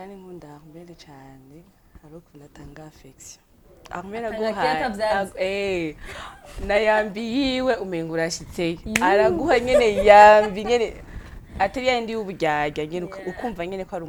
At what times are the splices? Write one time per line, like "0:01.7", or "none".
none